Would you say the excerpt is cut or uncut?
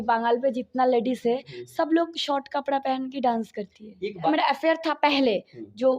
cut